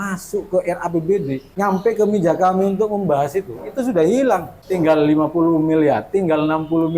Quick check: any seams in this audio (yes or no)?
yes